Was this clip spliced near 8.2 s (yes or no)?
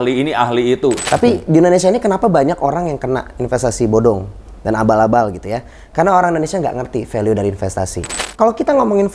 yes